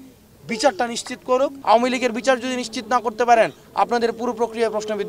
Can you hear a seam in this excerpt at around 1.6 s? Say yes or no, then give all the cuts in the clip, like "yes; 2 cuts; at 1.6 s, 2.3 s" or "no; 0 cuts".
yes; 1 cut; at 1.6 s